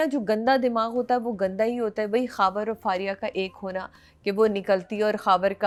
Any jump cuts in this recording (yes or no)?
no